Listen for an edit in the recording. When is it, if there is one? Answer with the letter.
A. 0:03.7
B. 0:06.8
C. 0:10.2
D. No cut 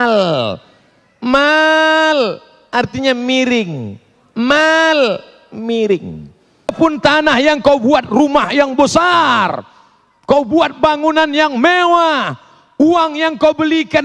B